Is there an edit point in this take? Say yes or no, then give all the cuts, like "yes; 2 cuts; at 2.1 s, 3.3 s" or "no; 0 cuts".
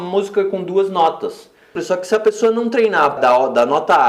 yes; 2 cuts; at 1.8 s, 3.2 s